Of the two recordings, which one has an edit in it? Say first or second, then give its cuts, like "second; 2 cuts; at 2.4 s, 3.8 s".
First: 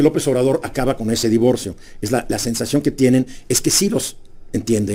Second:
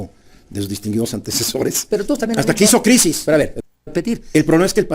second; 1 cut; at 3.6 s